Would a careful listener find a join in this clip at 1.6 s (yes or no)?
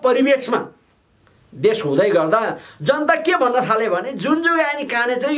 no